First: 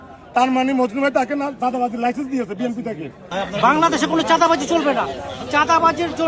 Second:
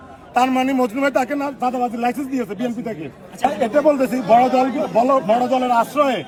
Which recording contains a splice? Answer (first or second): first